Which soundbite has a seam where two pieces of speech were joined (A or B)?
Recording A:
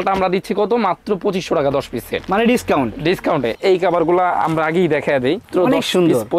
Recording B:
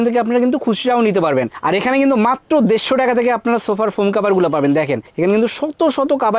A